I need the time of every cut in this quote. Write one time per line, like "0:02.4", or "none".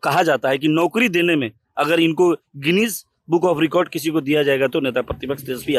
none